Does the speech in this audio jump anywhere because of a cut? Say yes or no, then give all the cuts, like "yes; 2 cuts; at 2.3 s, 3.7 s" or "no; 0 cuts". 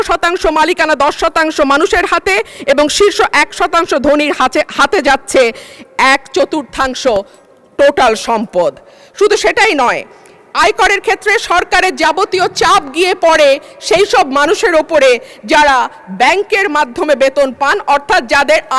no; 0 cuts